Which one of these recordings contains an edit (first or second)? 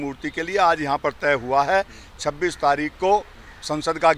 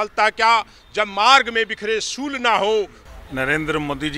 second